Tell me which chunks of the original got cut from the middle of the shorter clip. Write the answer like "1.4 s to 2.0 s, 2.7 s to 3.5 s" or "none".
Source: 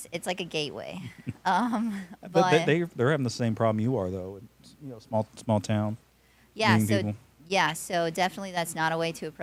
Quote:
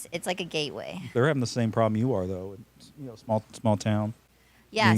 1.1 s to 2.9 s